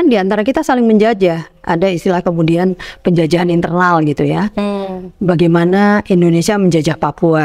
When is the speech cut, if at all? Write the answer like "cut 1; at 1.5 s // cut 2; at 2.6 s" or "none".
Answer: none

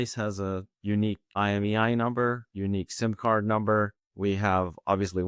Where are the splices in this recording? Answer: cut 1; at 1.2 s // cut 2; at 4.0 s

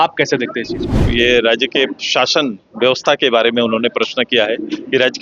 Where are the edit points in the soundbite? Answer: cut 1; at 1.0 s

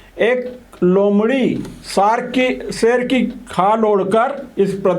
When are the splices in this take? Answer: none

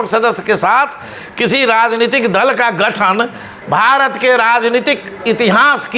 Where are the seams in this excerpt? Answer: none

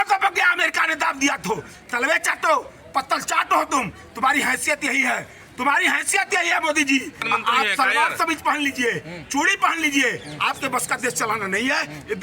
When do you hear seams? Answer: cut 1; at 7.2 s

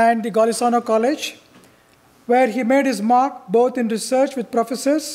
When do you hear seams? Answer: cut 1; at 2.7 s

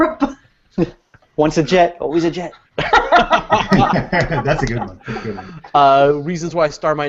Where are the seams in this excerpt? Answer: none

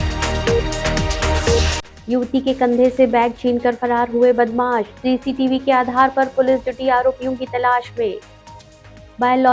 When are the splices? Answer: cut 1; at 1.8 s

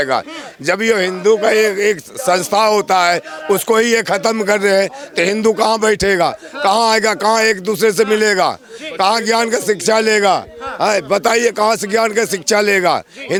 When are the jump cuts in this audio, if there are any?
none

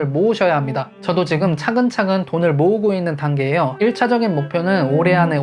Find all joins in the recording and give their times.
cut 1; at 0.9 s

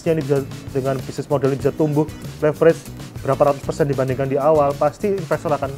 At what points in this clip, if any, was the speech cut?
none

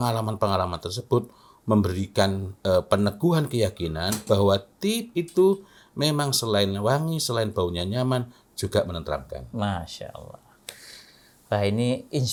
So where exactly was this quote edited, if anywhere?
none

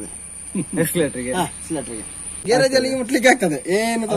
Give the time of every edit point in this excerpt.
none

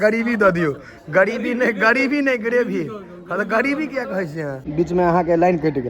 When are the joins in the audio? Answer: cut 1; at 4.6 s

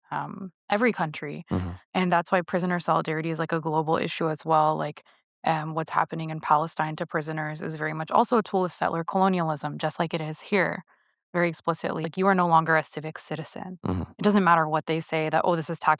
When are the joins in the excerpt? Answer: cut 1; at 12.0 s

